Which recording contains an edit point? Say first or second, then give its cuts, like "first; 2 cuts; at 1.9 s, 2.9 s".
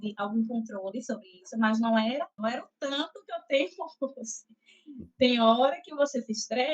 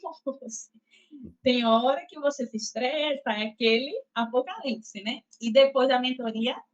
first; 1 cut; at 2.4 s